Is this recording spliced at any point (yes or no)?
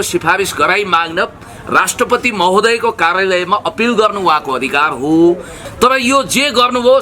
yes